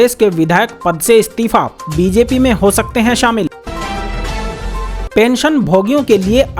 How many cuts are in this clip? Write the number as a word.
two